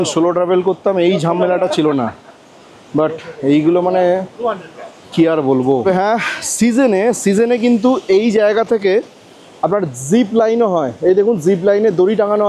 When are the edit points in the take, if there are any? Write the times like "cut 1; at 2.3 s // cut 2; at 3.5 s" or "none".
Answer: none